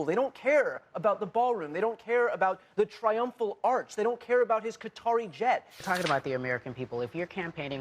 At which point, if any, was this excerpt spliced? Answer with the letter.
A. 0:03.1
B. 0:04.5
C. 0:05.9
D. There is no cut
C